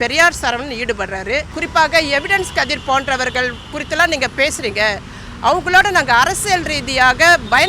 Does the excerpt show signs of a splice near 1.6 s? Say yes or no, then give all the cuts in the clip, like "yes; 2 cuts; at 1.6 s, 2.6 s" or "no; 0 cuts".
yes; 1 cut; at 1.6 s